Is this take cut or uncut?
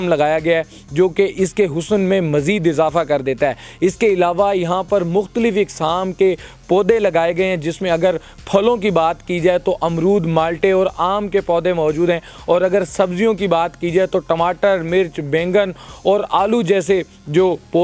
uncut